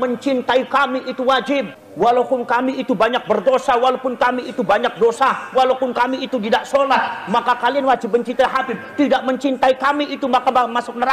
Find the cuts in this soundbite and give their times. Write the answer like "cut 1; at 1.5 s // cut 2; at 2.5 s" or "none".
cut 1; at 1.8 s